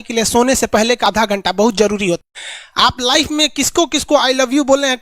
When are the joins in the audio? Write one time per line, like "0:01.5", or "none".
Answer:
0:01.0
0:02.2